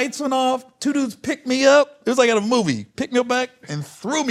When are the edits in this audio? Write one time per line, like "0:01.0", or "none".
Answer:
none